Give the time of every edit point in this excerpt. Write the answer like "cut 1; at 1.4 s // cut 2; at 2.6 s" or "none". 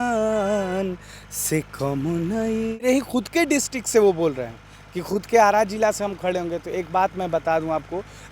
cut 1; at 2.8 s